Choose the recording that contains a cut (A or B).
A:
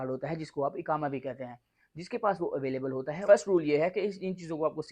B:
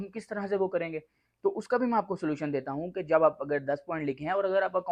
A